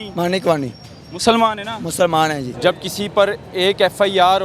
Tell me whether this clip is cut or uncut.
cut